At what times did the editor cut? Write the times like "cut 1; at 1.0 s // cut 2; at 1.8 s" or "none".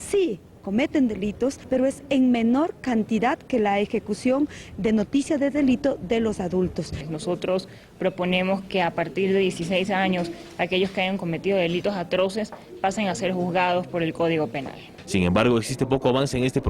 cut 1; at 1.8 s